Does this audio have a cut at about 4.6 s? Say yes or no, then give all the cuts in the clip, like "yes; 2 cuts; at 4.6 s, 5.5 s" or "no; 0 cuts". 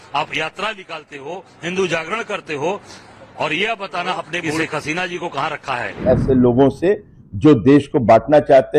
yes; 2 cuts; at 4.6 s, 6.0 s